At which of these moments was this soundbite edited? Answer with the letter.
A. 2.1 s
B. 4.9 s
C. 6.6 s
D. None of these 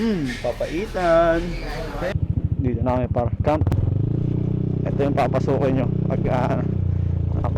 A